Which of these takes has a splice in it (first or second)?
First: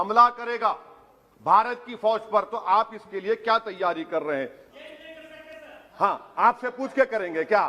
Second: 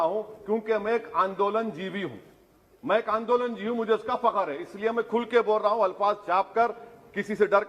first